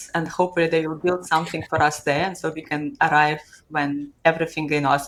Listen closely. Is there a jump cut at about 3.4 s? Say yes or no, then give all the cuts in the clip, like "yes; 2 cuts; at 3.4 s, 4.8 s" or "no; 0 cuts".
no; 0 cuts